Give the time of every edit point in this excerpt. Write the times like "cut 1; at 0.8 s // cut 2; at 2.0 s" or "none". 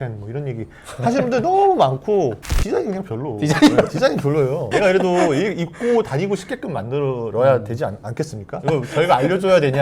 cut 1; at 2.4 s // cut 2; at 8.6 s